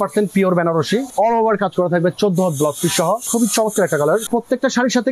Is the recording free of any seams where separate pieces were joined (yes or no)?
no